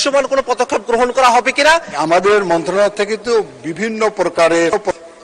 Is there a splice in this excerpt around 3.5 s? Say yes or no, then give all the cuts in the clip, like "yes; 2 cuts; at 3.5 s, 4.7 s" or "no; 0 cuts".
no; 1 cut; at 1.9 s